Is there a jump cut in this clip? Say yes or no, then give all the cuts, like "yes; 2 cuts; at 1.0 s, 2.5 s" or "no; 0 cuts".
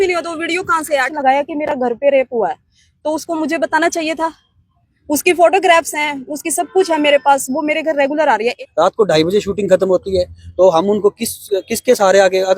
yes; 2 cuts; at 1.1 s, 8.6 s